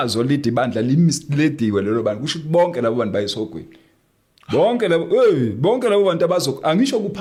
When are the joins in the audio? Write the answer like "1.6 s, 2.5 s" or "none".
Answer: none